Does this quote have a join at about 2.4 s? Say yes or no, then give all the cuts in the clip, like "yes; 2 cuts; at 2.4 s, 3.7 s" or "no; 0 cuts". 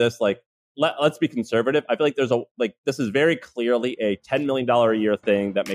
no; 0 cuts